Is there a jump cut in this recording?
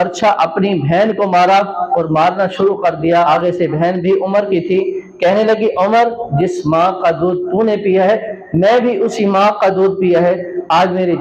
yes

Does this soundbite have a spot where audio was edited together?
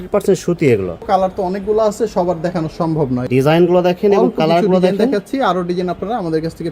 yes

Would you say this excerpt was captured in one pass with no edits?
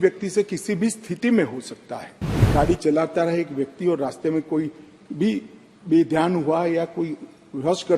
no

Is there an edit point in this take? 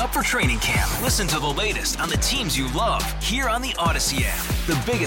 no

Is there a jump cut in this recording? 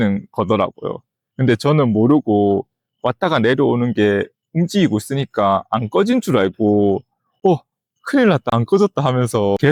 no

